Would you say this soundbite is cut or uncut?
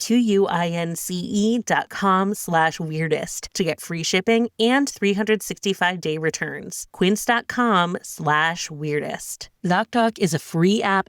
cut